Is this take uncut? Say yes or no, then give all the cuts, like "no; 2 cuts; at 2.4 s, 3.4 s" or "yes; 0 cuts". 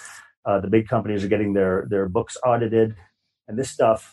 yes; 0 cuts